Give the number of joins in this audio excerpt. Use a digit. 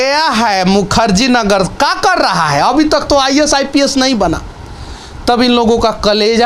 0